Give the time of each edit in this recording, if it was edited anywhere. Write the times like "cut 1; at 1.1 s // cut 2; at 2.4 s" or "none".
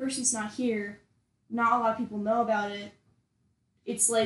none